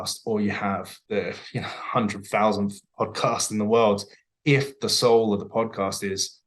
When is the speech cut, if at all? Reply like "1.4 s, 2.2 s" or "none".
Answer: 0.9 s